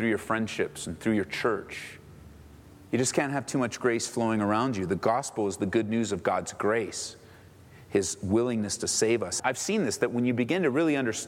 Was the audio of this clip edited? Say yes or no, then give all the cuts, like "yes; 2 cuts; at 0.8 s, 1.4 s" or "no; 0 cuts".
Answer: yes; 1 cut; at 9.3 s